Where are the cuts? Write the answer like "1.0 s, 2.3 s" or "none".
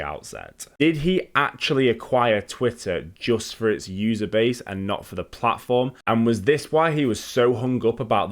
6.0 s